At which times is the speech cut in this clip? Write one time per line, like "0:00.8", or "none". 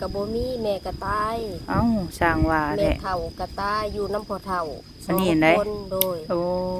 none